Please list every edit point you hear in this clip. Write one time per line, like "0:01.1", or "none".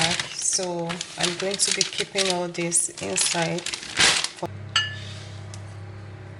0:04.5